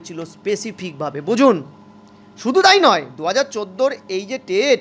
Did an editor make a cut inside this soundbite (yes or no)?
no